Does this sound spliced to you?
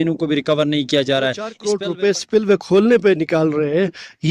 yes; 1 cut; at 1.6 s

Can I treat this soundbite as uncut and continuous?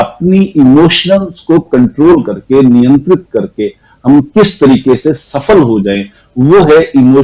yes; 0 cuts

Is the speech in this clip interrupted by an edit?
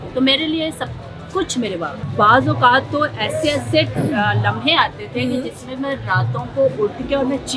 yes; 1 cut; at 1.9 s

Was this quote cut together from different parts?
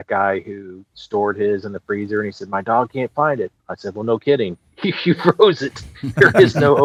no; 0 cuts

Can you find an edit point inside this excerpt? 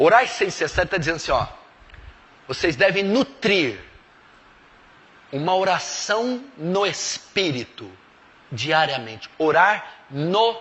yes; 1 cut; at 6.5 s

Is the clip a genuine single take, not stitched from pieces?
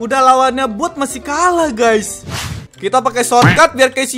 no; 1 cut; at 2.4 s

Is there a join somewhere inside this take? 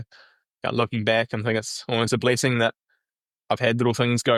no; 0 cuts

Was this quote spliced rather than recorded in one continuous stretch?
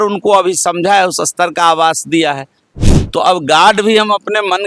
yes; 1 cut; at 2.7 s

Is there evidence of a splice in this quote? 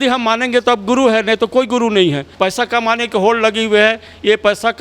yes; 1 cut; at 2.3 s

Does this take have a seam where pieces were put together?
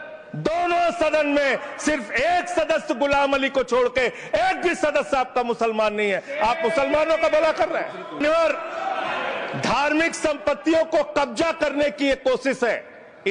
yes; 1 cut; at 8.2 s

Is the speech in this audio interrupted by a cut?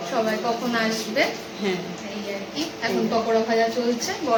no; 0 cuts

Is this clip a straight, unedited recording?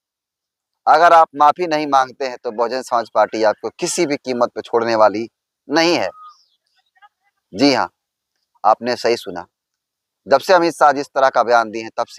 yes; 0 cuts

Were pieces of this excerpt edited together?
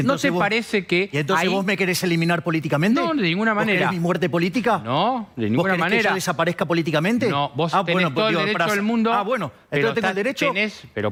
no; 0 cuts

